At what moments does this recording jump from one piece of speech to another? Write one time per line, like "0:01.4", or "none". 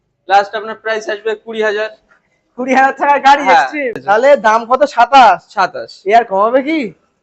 0:04.0